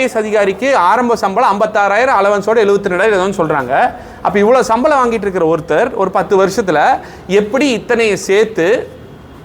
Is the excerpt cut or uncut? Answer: uncut